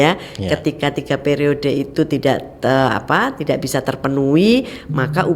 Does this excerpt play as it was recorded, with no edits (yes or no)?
yes